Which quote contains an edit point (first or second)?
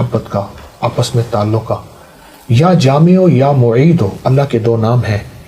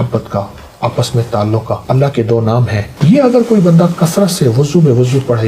second